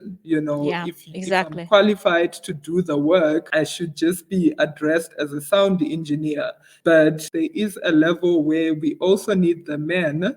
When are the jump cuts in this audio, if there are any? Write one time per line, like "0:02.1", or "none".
0:07.2